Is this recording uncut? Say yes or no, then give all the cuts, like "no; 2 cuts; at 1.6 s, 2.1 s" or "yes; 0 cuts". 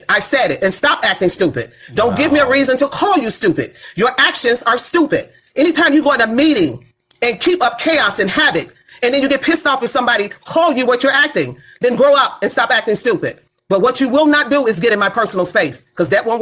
yes; 0 cuts